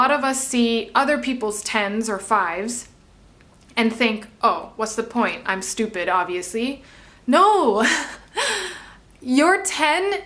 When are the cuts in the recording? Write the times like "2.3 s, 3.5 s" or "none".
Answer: none